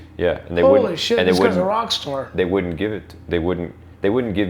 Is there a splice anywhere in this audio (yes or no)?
no